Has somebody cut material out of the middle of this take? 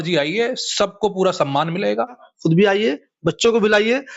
yes; 1 cut; at 2.3 s

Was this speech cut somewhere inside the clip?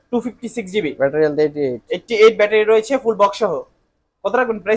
no; 0 cuts

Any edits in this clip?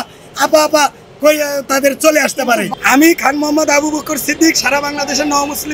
yes; 1 cut; at 2.7 s

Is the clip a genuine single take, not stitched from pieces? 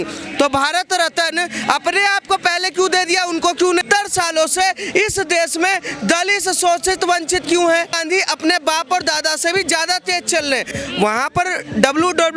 no; 3 cuts; at 3.8 s, 8.0 s, 10.7 s

